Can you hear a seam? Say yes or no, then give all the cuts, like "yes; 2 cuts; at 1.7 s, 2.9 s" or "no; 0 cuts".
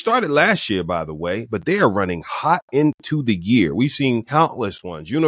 yes; 1 cut; at 4.3 s